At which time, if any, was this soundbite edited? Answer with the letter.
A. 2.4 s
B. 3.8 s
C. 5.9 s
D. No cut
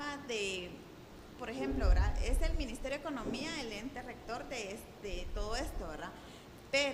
A